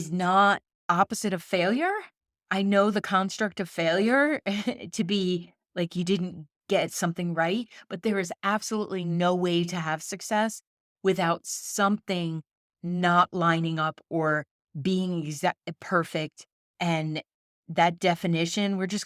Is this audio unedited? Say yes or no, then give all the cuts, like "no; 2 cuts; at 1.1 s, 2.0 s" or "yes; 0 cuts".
yes; 0 cuts